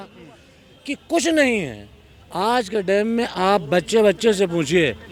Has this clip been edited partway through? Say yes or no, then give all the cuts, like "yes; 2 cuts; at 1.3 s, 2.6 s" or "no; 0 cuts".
no; 0 cuts